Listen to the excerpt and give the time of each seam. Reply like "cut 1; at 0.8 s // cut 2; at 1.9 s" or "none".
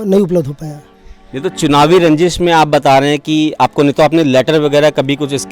none